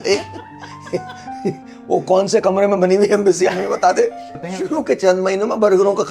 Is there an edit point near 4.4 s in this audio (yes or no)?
yes